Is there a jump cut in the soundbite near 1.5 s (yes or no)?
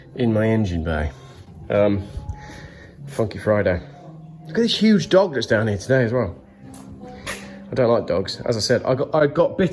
no